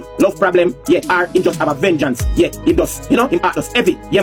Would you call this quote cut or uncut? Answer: uncut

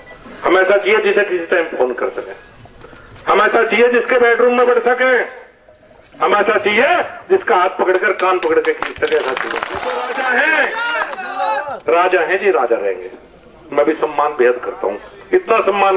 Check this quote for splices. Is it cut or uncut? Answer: cut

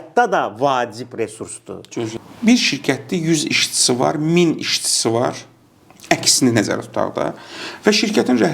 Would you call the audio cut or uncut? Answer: cut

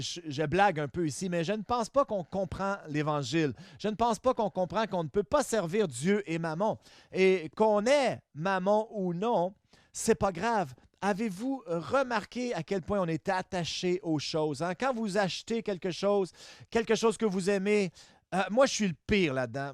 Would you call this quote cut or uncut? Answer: uncut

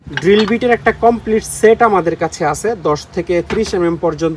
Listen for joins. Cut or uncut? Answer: uncut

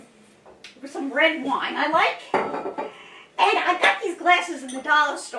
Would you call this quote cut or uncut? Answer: uncut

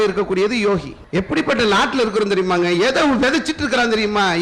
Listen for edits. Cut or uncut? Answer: cut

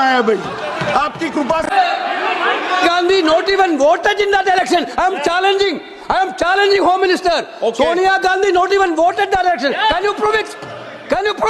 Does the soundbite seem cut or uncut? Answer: cut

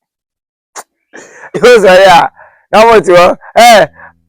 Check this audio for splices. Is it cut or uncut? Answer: cut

